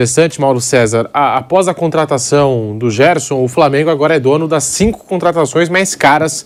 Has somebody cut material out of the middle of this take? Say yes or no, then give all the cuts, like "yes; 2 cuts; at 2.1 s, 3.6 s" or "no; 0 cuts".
no; 0 cuts